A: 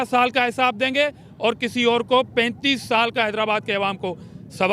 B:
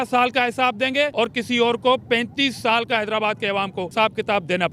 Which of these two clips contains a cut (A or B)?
B